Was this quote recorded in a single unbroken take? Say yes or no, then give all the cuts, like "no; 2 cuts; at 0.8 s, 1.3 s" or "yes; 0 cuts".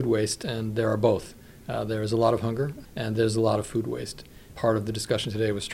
yes; 0 cuts